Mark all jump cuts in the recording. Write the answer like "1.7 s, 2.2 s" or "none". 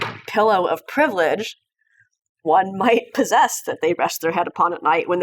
2.4 s